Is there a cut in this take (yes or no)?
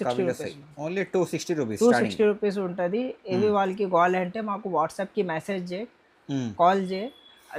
no